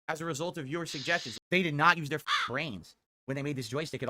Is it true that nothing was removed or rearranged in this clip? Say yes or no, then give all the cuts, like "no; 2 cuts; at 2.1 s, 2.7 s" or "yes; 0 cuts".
no; 1 cut; at 1.3 s